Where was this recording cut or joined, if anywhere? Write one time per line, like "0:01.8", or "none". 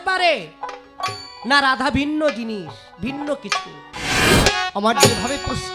0:04.3

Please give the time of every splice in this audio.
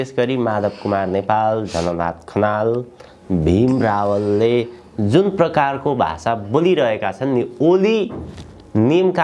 none

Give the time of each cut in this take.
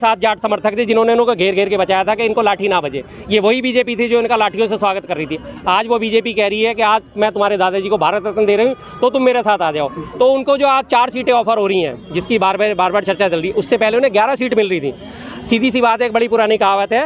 none

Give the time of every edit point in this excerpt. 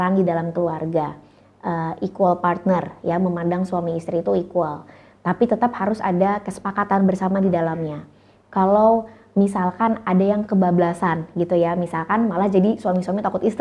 none

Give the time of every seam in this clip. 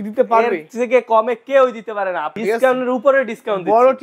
0:02.3

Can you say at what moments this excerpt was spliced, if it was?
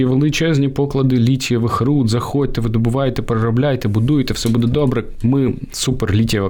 none

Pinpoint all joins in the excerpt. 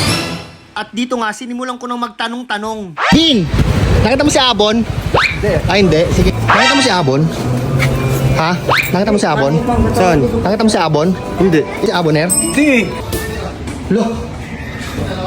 0:13.0

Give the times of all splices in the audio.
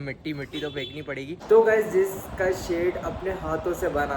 0:01.4

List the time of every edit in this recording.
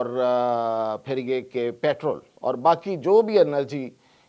0:02.3

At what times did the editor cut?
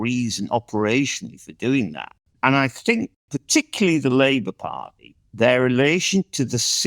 0:02.2
0:03.2

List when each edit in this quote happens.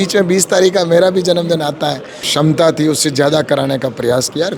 0:02.2

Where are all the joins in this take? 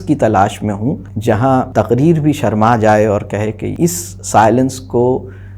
0:01.1
0:01.7
0:03.7

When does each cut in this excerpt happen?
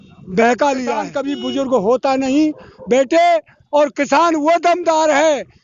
0:01.1

